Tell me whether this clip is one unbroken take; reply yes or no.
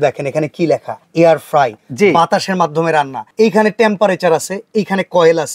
yes